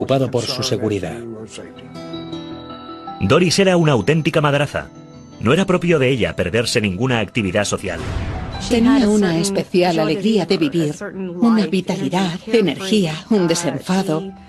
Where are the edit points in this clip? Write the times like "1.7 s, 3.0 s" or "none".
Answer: 11.8 s